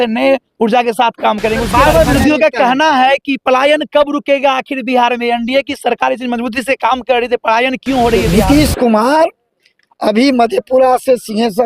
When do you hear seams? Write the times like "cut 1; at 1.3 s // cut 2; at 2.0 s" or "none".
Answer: cut 1; at 1.7 s // cut 2; at 8.3 s